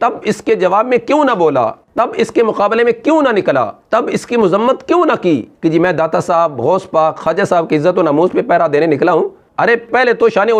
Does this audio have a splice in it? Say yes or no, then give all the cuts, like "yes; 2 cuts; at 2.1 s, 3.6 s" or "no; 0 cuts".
yes; 2 cuts; at 1.8 s, 5.5 s